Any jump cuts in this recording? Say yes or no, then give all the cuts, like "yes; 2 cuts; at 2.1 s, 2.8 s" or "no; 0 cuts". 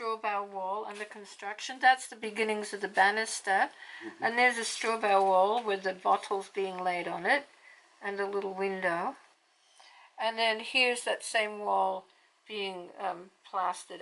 no; 0 cuts